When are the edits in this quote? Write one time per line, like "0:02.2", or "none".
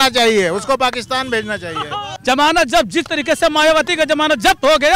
0:02.1